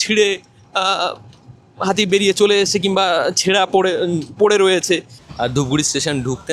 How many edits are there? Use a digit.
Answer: 1